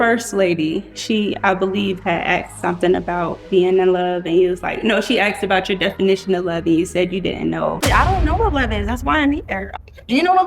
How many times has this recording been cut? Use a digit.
2